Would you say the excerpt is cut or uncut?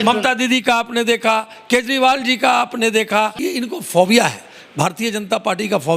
cut